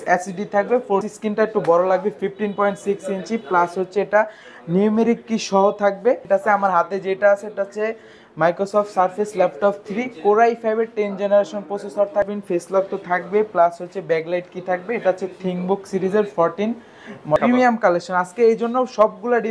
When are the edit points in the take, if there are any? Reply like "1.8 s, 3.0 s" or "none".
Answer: 1.1 s, 6.2 s, 12.3 s, 17.4 s